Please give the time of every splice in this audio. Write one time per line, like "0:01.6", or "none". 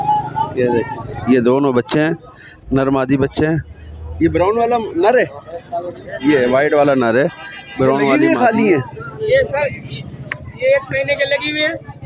0:08.2